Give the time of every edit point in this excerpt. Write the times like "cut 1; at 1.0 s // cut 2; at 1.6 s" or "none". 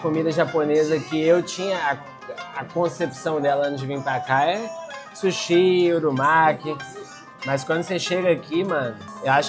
none